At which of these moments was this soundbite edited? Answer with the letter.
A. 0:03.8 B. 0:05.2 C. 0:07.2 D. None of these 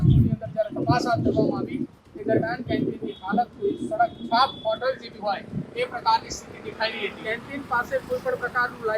C